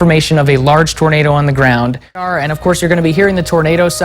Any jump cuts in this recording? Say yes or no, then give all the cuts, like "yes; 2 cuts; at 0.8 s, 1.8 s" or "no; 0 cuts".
yes; 1 cut; at 2.3 s